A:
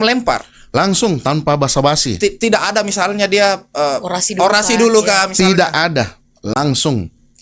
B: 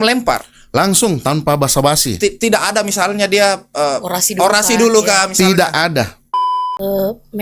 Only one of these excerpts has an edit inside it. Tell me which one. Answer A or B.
B